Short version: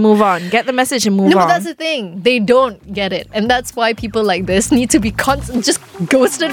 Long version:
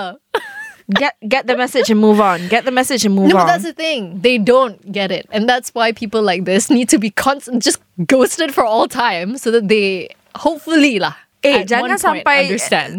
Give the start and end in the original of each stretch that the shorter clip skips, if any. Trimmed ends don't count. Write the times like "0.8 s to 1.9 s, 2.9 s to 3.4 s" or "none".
none